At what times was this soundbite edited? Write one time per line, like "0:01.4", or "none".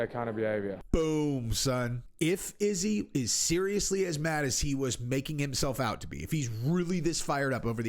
0:00.8
0:02.0